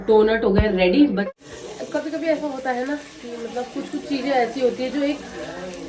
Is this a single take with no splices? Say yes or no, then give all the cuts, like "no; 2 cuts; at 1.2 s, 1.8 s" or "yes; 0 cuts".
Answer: no; 1 cut; at 1.3 s